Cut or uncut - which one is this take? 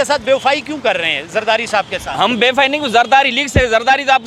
uncut